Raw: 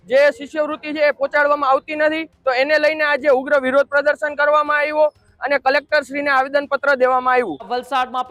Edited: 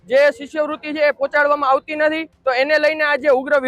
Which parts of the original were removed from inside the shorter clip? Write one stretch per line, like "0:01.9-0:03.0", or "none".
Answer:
none